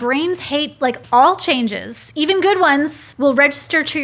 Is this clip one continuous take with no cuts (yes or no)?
no